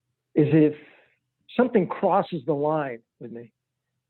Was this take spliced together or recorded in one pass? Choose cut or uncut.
uncut